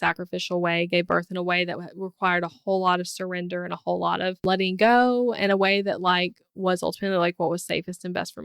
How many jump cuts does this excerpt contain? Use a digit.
1